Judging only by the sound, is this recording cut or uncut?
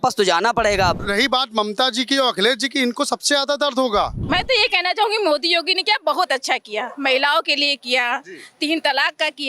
cut